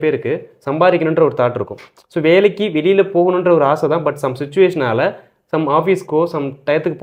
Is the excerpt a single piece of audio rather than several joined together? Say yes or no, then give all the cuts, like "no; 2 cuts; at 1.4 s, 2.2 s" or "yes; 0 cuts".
yes; 0 cuts